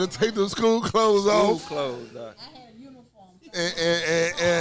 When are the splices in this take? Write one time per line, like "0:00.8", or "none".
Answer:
none